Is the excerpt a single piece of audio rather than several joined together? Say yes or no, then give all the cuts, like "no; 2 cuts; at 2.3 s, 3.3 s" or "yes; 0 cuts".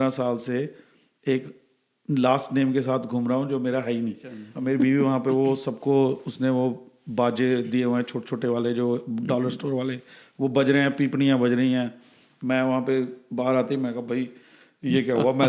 no; 1 cut; at 4.5 s